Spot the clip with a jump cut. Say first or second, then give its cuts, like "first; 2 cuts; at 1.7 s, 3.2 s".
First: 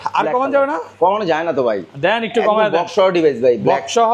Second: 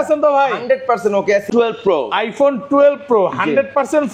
second; 1 cut; at 1.5 s